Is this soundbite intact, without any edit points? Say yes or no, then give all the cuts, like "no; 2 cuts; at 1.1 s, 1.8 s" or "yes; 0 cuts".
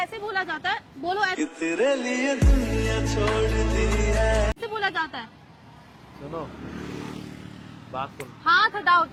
yes; 0 cuts